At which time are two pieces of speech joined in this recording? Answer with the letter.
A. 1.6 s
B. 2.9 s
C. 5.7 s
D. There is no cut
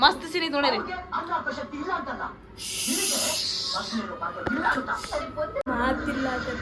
C